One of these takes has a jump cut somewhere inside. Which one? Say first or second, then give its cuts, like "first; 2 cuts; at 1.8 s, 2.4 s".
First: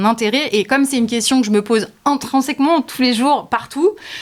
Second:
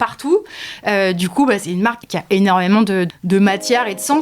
second; 2 cuts; at 2.1 s, 3.1 s